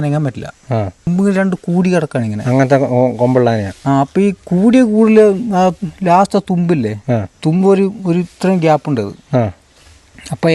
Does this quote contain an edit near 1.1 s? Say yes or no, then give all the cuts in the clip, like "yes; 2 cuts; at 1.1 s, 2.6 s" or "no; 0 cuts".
yes; 1 cut; at 1.1 s